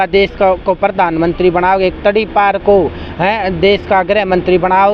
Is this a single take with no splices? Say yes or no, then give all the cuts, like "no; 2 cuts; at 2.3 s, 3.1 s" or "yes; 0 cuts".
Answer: yes; 0 cuts